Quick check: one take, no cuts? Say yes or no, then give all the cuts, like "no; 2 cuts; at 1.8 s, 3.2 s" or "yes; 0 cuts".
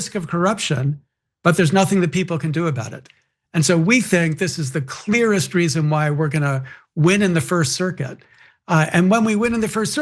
yes; 0 cuts